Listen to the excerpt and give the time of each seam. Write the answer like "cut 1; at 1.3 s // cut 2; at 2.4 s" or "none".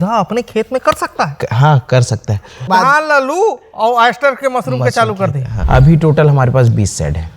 cut 1; at 2.6 s // cut 2; at 5.5 s